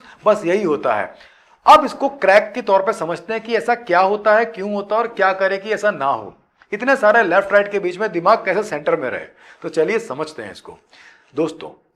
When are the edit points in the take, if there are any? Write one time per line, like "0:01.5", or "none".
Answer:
none